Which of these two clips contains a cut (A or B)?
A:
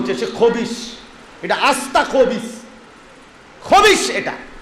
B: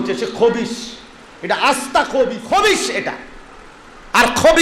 B